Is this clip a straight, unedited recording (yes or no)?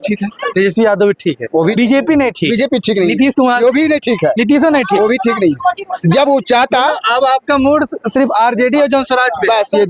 yes